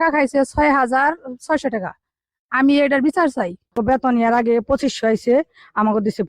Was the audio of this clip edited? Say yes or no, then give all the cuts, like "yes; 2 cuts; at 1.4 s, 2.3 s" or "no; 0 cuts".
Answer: yes; 1 cut; at 3.7 s